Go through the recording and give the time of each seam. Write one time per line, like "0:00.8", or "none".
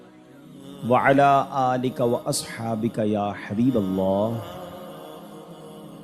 0:05.0

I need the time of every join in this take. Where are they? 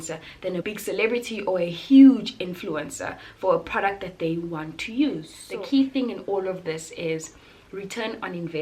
0:05.4

